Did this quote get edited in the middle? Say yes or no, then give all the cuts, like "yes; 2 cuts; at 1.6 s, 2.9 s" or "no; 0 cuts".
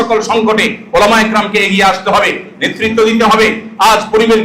no; 0 cuts